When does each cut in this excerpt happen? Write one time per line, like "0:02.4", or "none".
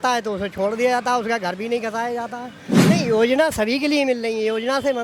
0:02.9